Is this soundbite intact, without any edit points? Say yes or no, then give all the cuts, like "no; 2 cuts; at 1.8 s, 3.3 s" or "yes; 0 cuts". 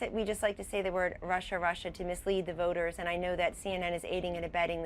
no; 1 cut; at 3.0 s